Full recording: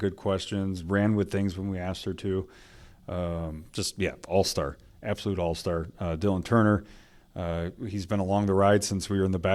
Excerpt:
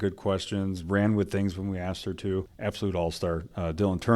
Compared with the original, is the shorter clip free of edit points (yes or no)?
no